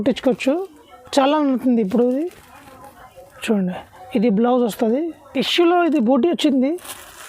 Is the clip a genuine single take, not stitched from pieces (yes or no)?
no